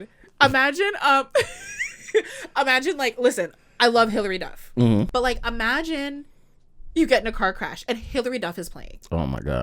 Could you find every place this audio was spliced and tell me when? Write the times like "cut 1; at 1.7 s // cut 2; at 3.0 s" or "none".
cut 1; at 5.1 s